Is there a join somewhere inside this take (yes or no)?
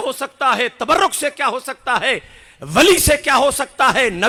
no